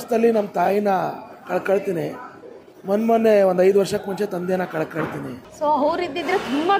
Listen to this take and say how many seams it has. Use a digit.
1